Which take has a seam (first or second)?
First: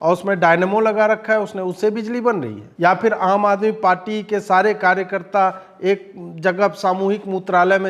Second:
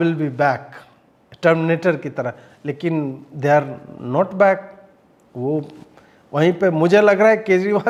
first